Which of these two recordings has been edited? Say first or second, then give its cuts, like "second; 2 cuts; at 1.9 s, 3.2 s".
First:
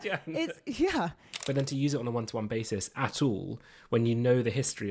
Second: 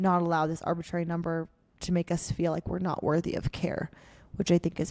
first; 1 cut; at 1.3 s